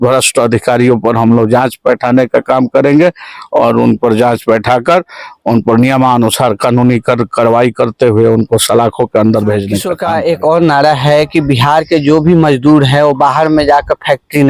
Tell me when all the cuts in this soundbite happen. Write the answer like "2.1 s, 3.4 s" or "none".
9.9 s